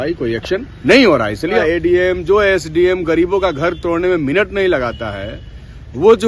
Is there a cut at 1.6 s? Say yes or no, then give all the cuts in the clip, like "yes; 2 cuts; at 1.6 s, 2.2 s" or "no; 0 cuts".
yes; 1 cut; at 1.6 s